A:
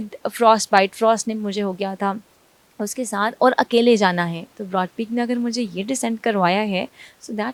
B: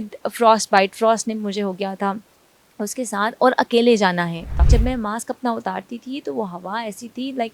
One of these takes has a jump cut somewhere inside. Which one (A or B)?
B